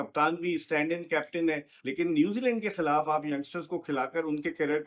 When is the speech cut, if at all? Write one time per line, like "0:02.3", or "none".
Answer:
0:01.7